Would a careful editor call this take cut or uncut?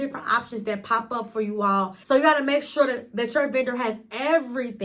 cut